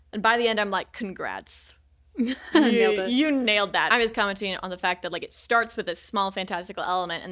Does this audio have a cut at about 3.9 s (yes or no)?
yes